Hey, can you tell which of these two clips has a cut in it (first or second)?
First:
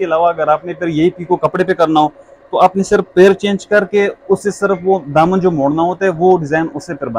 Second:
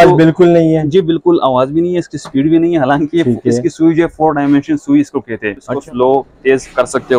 second